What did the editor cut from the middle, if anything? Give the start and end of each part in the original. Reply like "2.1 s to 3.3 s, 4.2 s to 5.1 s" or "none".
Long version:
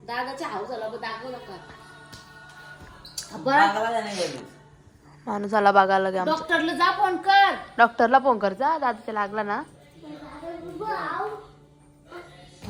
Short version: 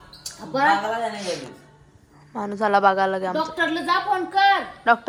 none